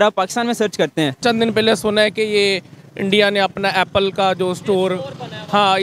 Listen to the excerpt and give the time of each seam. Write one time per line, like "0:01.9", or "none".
0:01.2